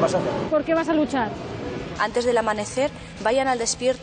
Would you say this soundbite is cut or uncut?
cut